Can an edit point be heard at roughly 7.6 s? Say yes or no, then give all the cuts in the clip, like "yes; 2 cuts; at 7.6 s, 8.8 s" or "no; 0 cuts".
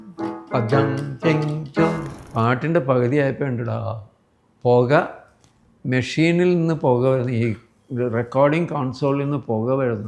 no; 1 cut; at 2.1 s